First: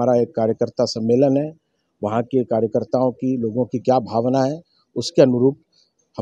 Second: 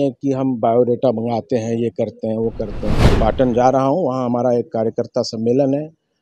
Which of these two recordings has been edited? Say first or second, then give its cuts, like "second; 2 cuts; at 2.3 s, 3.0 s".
second; 1 cut; at 3.1 s